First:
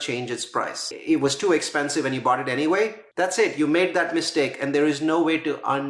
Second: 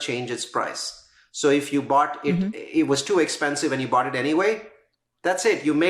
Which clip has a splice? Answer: first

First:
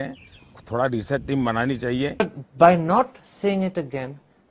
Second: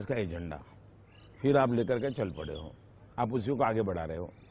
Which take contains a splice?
first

